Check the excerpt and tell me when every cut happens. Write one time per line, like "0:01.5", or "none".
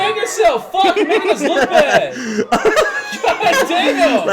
none